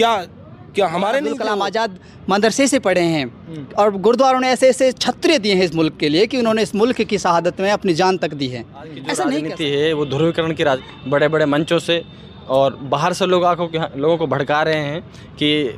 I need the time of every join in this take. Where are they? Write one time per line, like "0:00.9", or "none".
0:01.5
0:09.3
0:10.9